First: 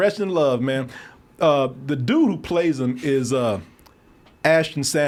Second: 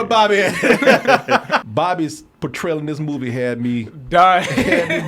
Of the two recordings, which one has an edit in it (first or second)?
second